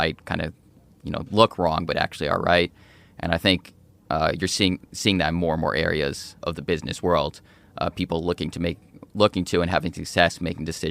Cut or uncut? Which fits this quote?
cut